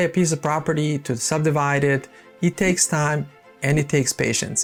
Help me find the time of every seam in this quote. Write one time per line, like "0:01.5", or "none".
none